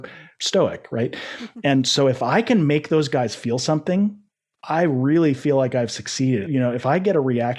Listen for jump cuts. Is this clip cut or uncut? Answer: cut